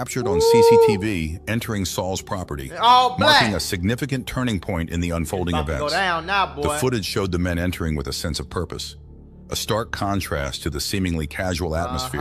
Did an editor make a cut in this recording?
no; 0 cuts

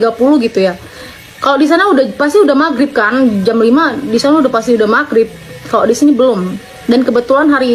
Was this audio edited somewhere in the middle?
no; 0 cuts

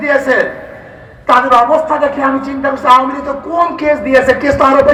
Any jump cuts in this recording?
no; 0 cuts

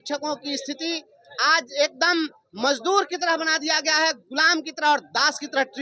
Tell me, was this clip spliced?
no; 0 cuts

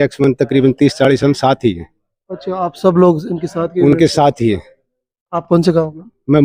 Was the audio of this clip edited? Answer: no; 0 cuts

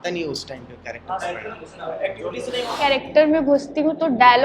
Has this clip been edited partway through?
yes; 1 cut; at 2.7 s

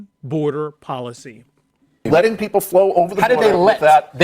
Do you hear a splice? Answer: yes; 1 cut; at 2.0 s

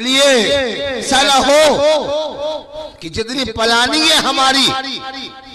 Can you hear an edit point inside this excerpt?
yes; 1 cut; at 1.1 s

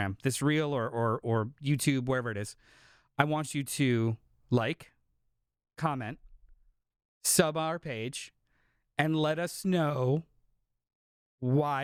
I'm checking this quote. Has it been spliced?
no; 0 cuts

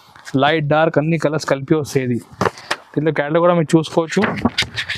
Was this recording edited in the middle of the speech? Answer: yes; 1 cut; at 2.7 s

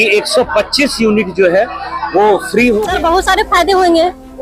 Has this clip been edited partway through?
yes; 1 cut; at 2.9 s

